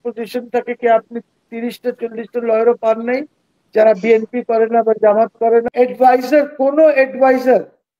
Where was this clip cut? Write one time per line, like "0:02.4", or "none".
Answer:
0:05.7

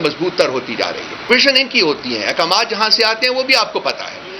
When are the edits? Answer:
0:01.3

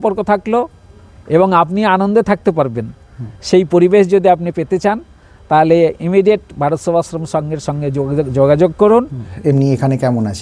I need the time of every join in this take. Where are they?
0:09.3

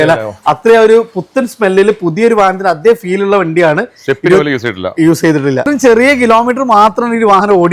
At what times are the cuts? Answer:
0:05.6

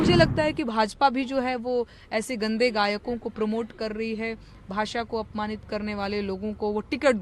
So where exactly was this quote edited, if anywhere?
none

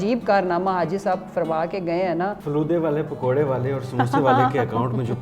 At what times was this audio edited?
0:02.4

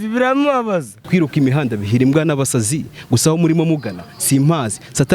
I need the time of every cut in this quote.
0:00.9

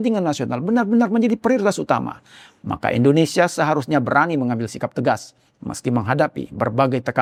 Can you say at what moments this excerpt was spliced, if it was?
none

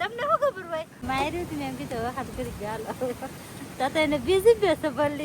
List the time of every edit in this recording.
0:01.0

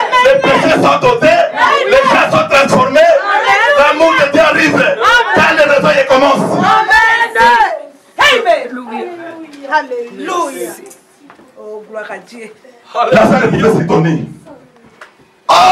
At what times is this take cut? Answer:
none

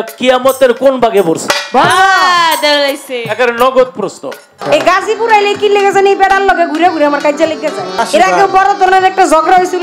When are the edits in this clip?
0:04.6
0:08.0

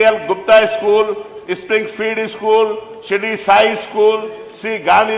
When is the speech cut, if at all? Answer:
none

